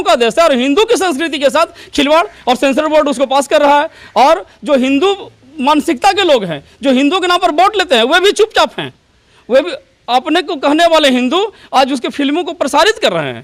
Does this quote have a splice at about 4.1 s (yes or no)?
no